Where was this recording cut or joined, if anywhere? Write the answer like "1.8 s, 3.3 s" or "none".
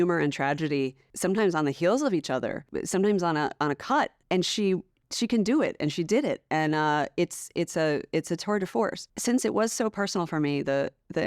1.0 s, 2.7 s, 4.2 s, 5.0 s, 9.1 s